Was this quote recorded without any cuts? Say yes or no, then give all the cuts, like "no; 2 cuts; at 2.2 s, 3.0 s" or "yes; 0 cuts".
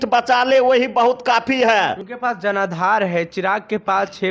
no; 1 cut; at 2.1 s